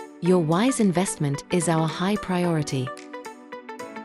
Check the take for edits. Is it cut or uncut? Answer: cut